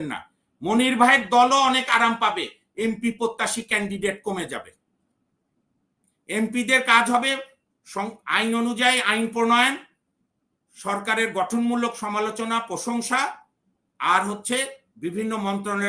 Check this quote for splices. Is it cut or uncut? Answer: uncut